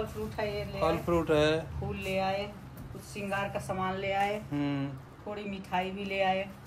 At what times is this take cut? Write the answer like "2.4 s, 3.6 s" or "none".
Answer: none